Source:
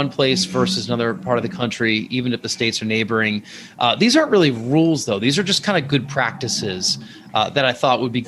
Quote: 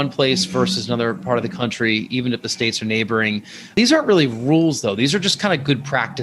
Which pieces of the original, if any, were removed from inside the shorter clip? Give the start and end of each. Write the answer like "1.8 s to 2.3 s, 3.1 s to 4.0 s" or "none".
3.7 s to 4.0 s